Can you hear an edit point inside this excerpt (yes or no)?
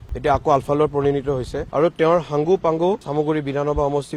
yes